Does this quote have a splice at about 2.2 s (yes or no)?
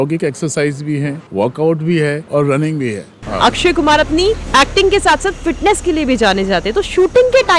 yes